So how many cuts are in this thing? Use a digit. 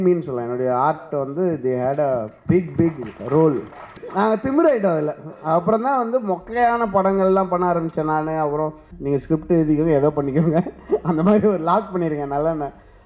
2